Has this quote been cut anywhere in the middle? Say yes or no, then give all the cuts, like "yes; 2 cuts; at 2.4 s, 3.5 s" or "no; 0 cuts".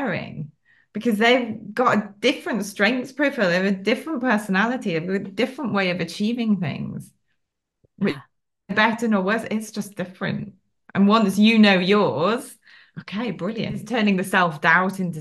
yes; 1 cut; at 13.8 s